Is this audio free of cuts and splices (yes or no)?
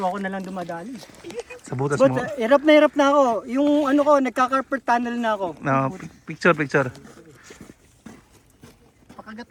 yes